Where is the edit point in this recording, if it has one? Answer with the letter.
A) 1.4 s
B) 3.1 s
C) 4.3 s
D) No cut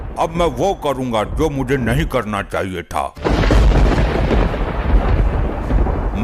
B